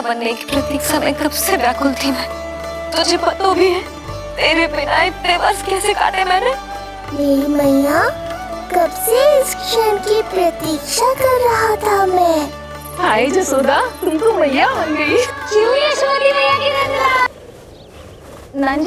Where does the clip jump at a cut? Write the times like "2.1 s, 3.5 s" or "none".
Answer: 17.3 s